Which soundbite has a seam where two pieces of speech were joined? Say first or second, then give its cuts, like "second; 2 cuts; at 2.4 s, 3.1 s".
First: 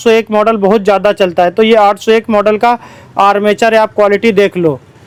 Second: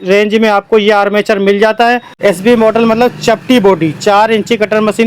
second; 1 cut; at 2.2 s